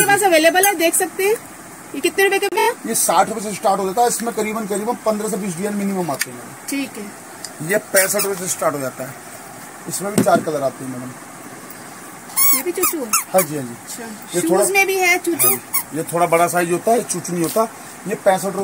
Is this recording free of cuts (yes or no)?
yes